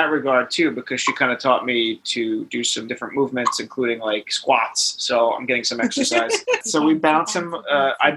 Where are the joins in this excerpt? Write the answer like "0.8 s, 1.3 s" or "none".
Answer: 2.9 s, 6.6 s